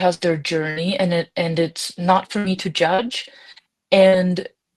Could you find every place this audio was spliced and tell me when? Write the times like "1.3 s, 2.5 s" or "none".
none